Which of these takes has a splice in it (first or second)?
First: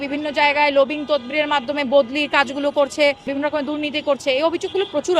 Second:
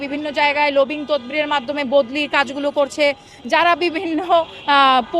first